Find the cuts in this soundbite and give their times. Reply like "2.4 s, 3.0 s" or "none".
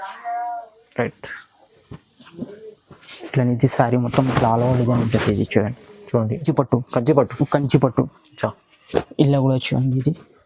6.4 s